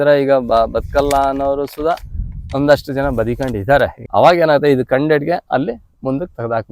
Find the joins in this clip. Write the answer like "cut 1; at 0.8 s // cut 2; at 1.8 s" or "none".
cut 1; at 4.0 s